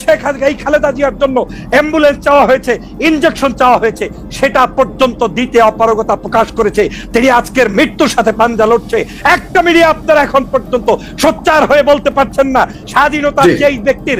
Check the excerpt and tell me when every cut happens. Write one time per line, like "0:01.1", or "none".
0:07.0
0:12.8